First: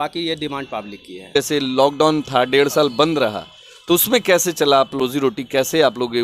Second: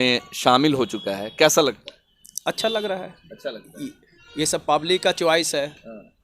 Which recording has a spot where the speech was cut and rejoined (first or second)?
first